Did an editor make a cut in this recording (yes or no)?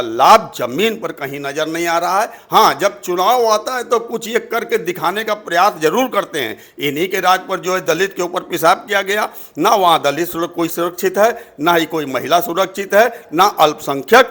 no